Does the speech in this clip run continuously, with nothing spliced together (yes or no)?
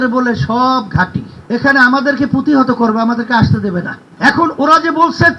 no